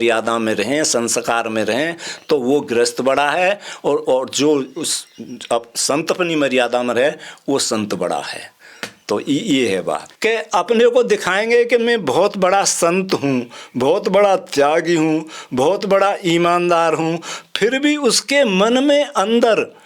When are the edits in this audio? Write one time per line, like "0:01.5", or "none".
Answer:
0:10.1